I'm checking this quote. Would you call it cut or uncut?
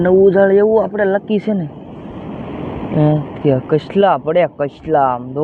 uncut